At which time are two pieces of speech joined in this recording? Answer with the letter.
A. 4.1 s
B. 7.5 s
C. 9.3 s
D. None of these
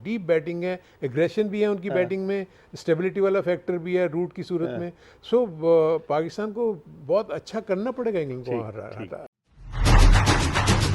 C